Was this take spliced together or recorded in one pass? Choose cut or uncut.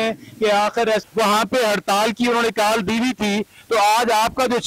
cut